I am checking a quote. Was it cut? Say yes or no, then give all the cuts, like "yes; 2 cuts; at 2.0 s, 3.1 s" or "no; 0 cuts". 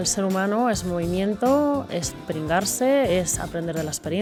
no; 0 cuts